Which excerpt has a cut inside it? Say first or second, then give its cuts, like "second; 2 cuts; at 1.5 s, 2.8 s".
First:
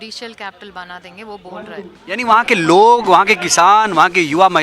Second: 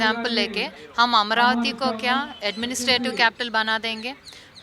first; 1 cut; at 2.0 s